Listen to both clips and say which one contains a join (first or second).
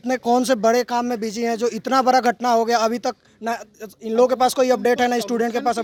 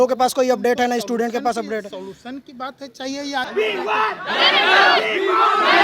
second